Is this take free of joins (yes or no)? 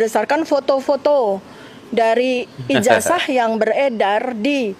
yes